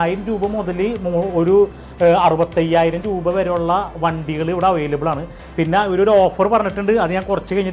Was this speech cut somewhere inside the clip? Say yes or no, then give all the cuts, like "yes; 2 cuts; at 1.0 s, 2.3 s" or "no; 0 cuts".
no; 0 cuts